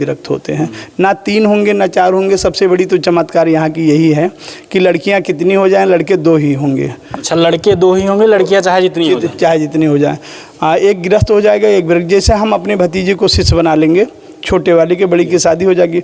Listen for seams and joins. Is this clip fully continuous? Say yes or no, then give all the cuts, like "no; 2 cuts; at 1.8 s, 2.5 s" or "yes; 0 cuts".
yes; 0 cuts